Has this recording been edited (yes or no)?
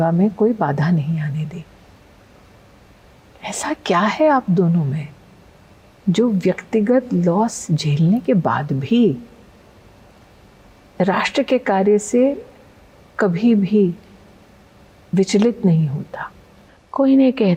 no